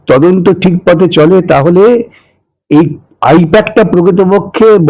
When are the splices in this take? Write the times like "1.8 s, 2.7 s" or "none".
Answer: none